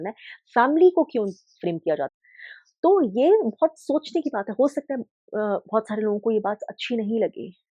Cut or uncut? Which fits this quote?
cut